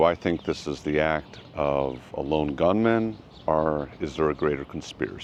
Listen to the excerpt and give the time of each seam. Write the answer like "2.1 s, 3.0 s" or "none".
none